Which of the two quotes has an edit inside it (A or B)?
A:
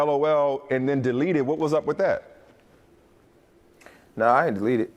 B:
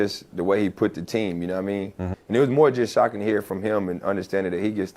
B